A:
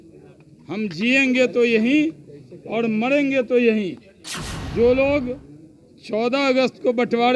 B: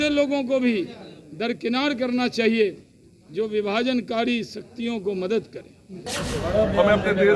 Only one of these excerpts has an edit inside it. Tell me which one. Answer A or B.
B